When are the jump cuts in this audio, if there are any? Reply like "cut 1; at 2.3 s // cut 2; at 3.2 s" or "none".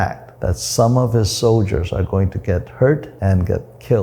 cut 1; at 3.1 s